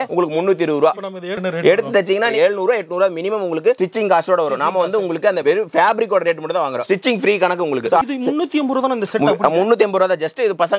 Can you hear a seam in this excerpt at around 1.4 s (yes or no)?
yes